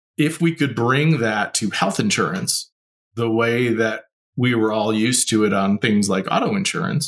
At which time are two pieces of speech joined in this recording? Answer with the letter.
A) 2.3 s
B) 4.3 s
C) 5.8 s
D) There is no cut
D